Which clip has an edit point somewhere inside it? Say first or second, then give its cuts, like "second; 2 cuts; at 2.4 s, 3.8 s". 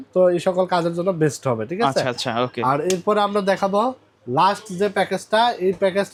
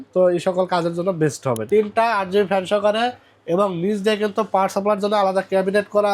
second; 1 cut; at 1.6 s